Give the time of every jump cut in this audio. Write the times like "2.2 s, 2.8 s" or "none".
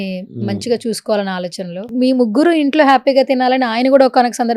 1.9 s